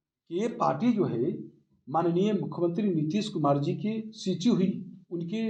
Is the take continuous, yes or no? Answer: yes